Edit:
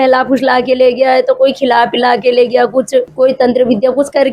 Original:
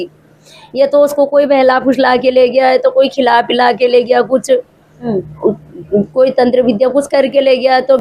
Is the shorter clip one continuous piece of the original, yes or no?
no